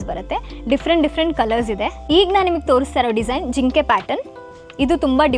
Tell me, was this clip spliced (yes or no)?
yes